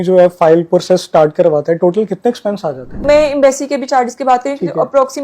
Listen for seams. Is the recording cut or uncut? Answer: cut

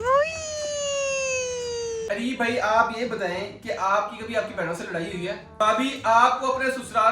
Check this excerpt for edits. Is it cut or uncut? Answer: cut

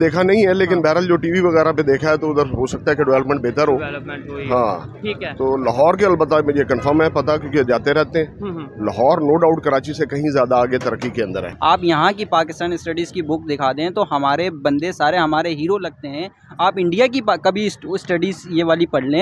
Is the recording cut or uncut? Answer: cut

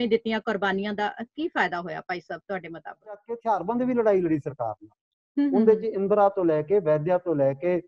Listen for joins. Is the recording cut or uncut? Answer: cut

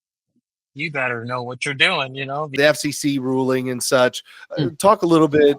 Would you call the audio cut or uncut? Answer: cut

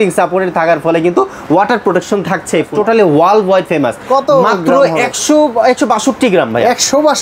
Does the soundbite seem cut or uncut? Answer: cut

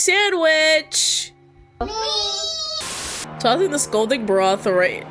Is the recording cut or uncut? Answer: cut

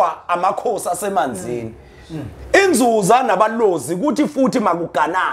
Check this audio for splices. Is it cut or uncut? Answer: uncut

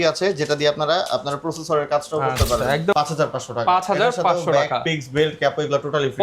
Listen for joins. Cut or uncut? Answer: cut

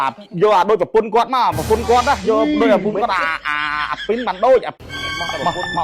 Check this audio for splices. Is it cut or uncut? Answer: cut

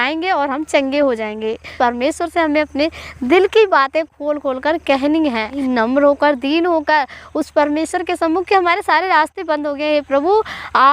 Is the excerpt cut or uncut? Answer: cut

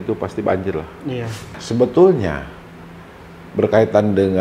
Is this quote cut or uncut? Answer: cut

